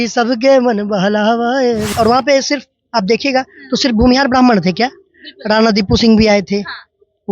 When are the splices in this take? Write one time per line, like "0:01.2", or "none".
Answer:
0:01.9